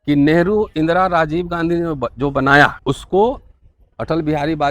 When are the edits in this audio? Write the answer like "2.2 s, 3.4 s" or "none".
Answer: 2.8 s